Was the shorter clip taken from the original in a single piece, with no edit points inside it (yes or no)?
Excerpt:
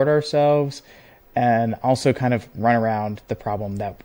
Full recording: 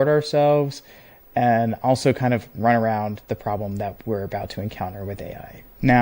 yes